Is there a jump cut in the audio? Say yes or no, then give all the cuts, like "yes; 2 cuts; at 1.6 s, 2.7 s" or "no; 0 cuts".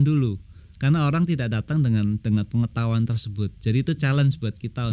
no; 0 cuts